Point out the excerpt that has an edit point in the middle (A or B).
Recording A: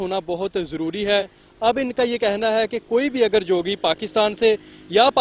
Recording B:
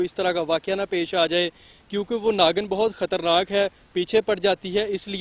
A